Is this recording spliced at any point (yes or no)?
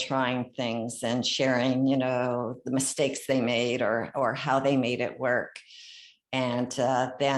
no